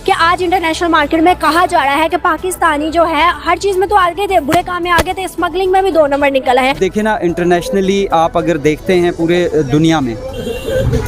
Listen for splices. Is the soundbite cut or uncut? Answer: cut